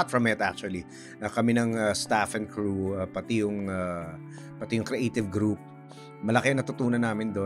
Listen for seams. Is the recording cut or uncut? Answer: uncut